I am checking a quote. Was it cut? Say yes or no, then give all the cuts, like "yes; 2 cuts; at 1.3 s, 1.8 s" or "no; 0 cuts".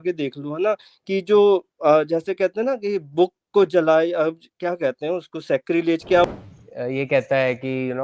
yes; 1 cut; at 6.3 s